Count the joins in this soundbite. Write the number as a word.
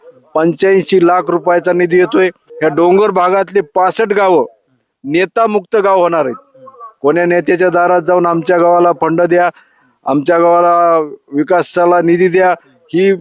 one